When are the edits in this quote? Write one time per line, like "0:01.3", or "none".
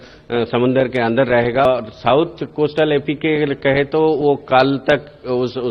0:01.7